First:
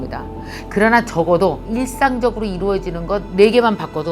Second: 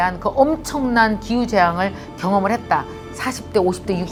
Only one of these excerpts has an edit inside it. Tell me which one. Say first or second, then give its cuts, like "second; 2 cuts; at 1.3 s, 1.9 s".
first; 1 cut; at 1.7 s